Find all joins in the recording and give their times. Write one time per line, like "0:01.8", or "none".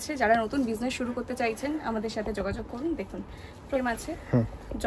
0:03.8